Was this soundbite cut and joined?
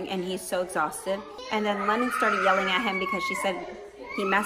yes; 1 cut; at 1.3 s

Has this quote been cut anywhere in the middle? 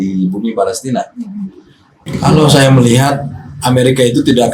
yes; 1 cut; at 2.0 s

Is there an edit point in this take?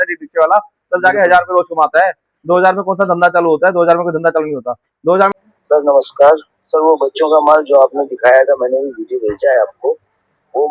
yes; 1 cut; at 5.3 s

